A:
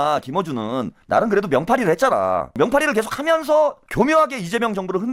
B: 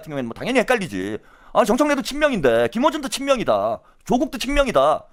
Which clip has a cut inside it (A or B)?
A